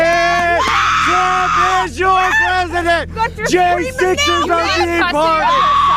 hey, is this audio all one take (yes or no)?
yes